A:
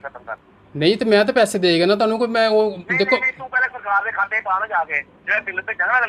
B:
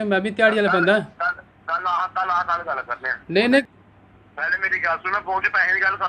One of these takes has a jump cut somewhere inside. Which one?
B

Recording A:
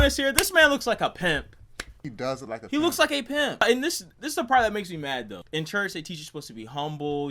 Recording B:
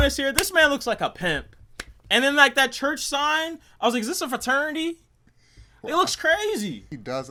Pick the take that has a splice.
A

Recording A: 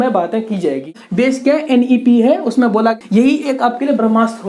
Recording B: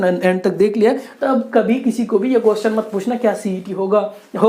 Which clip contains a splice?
A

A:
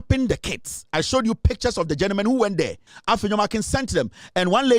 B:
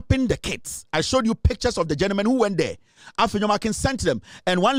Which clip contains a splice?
A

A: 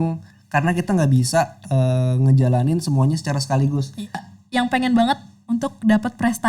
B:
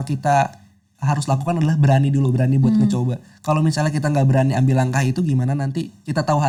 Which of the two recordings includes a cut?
A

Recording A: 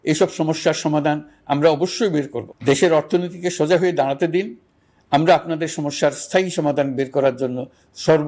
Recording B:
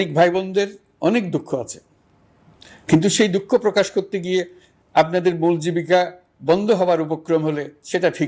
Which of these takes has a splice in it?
A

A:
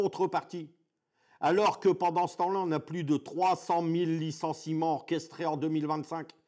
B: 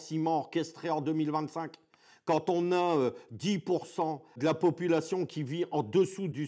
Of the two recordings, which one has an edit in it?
B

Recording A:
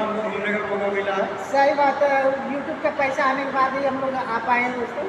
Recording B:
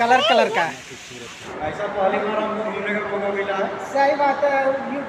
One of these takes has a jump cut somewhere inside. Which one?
B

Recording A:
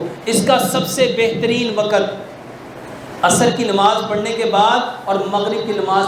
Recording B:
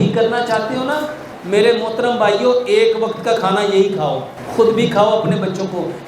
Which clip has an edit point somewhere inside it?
B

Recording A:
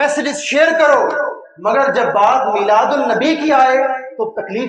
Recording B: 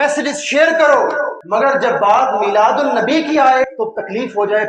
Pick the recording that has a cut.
B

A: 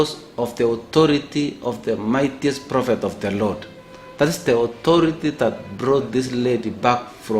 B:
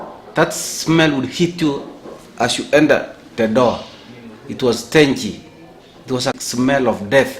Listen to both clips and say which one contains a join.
B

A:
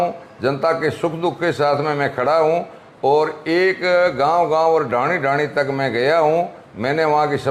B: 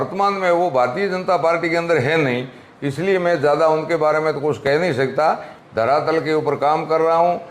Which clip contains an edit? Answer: B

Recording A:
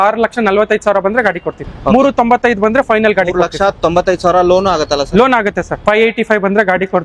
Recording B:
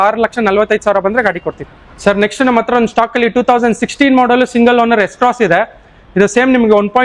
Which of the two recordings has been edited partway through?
A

